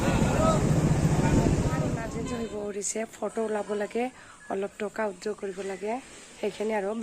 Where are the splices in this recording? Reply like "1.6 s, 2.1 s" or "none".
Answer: 2.1 s